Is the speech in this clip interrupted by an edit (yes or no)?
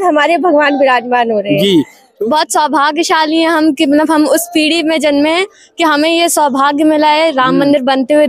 yes